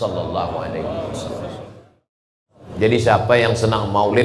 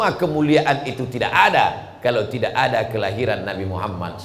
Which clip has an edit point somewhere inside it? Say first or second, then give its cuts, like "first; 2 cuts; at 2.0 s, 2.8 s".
first; 1 cut; at 2.3 s